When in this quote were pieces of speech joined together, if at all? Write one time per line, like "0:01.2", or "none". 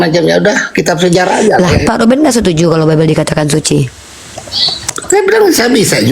0:01.8